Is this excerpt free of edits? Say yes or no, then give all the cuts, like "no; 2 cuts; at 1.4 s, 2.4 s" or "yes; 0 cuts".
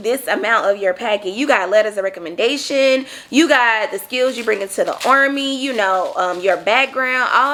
yes; 0 cuts